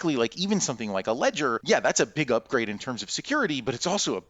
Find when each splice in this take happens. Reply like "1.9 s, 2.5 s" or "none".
1.6 s, 2.8 s